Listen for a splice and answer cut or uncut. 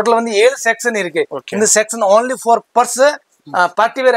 uncut